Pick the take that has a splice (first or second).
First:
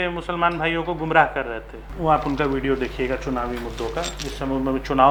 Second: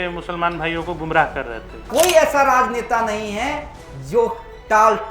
second